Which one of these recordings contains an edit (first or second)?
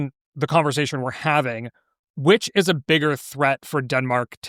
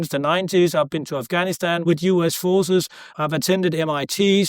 second